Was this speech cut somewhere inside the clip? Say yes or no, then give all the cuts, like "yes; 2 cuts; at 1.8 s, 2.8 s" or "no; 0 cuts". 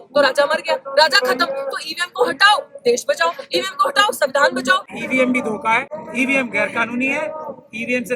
yes; 2 cuts; at 4.9 s, 6.0 s